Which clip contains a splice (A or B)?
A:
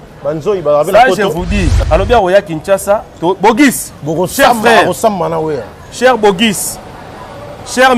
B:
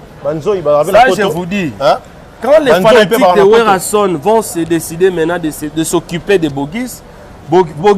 A